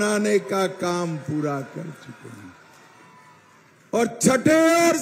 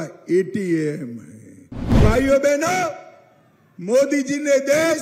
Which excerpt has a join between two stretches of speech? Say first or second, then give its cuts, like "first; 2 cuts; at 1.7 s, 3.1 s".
second; 1 cut; at 1.9 s